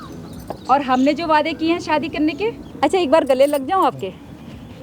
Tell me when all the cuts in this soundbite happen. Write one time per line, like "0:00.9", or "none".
0:02.7